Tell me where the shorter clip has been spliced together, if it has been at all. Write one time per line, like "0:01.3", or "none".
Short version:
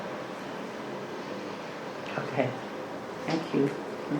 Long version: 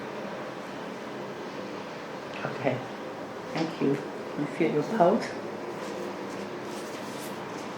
none